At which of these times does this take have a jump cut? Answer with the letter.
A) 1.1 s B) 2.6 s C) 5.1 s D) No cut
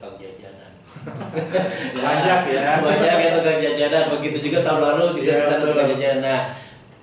D